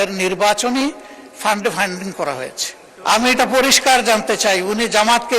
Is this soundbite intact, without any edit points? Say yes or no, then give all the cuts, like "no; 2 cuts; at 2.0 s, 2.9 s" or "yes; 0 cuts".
no; 1 cut; at 2.9 s